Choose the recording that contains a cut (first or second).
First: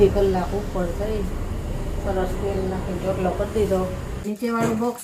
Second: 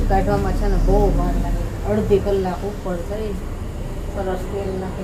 first